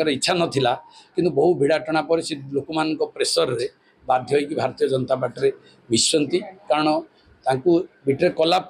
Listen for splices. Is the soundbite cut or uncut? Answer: uncut